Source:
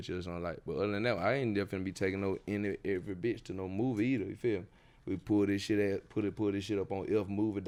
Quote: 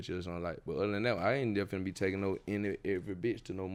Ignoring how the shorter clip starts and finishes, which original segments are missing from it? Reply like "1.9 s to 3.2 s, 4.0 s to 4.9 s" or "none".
none